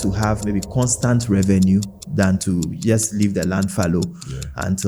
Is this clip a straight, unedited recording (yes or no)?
yes